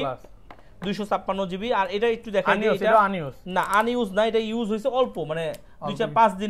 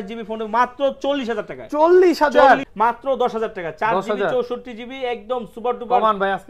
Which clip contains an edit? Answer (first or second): second